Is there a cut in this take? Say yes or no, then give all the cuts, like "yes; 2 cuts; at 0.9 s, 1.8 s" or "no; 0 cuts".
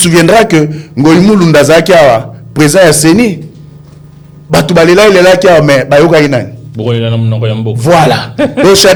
no; 0 cuts